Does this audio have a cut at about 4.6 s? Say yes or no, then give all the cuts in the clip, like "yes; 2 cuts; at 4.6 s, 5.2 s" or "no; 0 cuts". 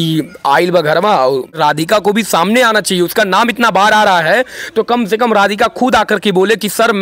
no; 1 cut; at 1.6 s